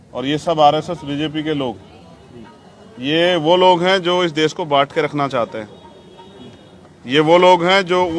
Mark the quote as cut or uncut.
uncut